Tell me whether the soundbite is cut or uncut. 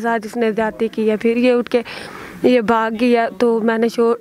uncut